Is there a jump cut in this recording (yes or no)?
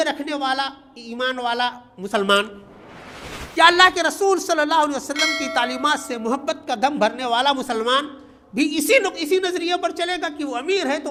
no